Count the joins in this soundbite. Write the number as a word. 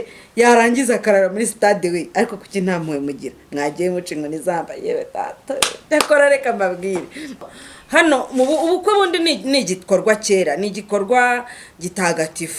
one